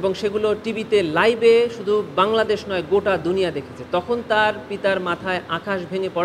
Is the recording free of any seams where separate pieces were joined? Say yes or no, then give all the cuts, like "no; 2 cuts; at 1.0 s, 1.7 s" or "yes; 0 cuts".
yes; 0 cuts